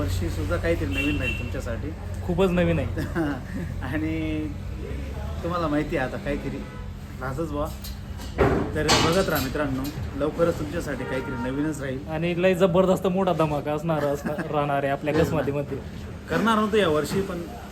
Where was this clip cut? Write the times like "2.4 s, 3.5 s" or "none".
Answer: none